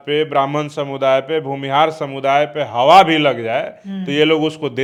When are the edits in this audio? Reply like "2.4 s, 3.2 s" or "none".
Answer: none